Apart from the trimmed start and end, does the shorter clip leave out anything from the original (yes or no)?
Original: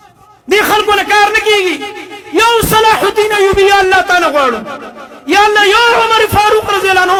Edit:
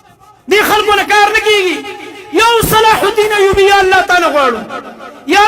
no